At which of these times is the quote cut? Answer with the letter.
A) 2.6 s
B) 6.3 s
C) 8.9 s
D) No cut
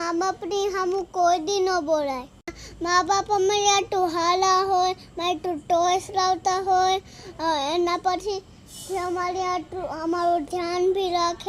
A